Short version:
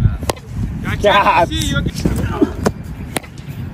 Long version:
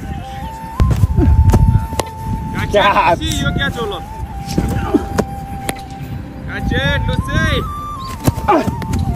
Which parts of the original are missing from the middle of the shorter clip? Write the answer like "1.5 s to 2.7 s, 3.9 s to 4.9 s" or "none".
3.6 s to 4.4 s